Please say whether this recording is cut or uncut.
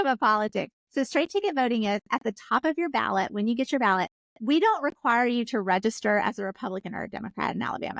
cut